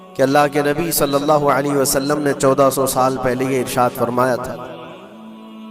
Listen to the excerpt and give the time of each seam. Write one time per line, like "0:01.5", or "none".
none